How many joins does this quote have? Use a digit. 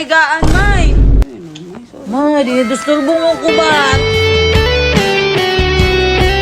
1